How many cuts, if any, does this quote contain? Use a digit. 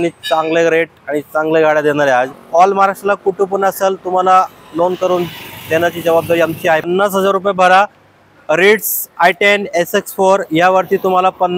2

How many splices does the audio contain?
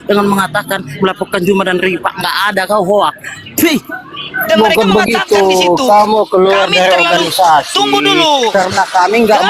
1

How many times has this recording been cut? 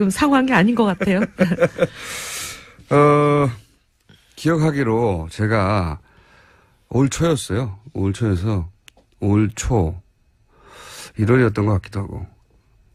0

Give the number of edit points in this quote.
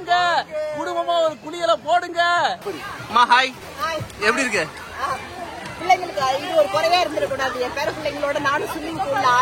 2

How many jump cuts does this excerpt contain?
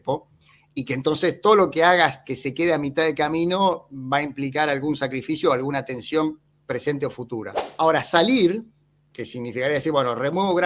1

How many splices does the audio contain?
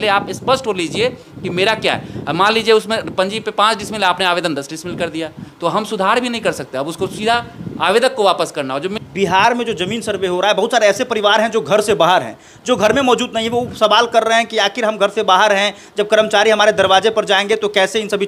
1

